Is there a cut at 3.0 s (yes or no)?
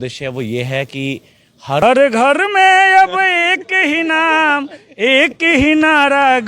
no